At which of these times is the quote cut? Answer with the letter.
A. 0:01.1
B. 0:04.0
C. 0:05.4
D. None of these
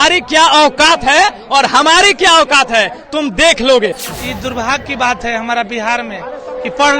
B